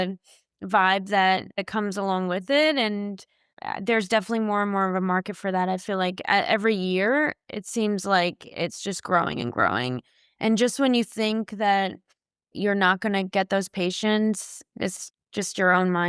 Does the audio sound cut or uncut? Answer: cut